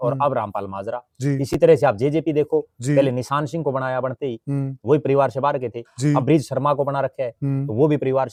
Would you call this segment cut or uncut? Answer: uncut